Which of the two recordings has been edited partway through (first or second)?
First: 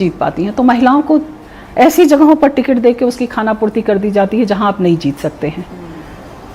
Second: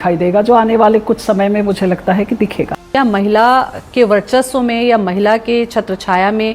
second